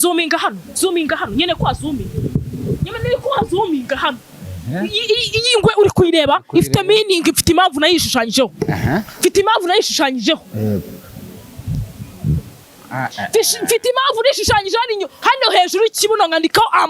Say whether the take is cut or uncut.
uncut